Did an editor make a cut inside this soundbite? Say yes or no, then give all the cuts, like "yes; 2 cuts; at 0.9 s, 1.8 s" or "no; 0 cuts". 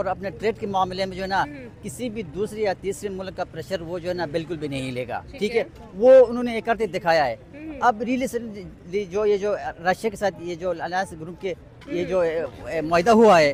no; 0 cuts